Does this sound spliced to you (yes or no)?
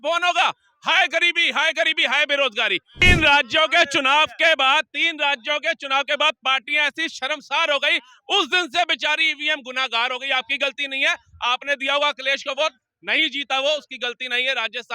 yes